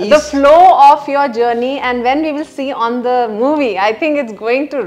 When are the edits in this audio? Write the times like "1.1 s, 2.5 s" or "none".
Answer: none